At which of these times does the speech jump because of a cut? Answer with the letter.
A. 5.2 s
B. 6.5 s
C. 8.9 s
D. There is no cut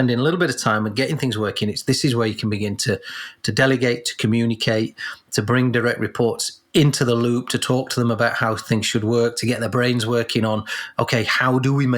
B